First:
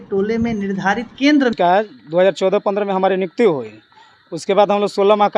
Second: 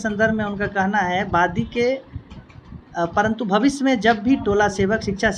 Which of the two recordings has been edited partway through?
first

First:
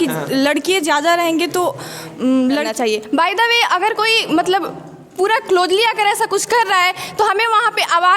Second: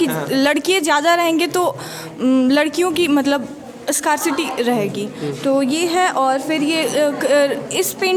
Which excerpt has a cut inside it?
first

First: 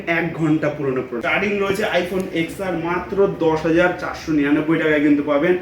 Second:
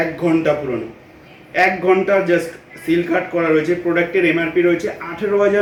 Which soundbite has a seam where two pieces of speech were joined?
first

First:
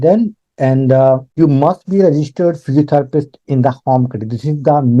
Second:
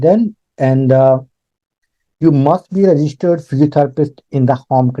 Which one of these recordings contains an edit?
first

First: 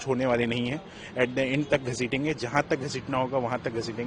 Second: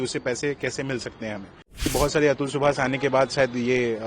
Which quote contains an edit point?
second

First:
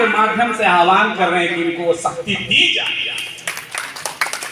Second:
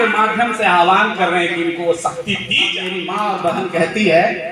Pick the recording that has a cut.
second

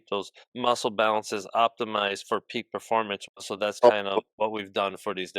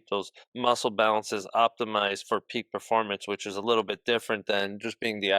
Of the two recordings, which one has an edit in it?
first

